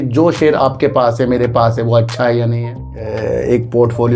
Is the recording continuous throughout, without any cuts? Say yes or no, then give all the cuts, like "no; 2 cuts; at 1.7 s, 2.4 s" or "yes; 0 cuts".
no; 1 cut; at 3.0 s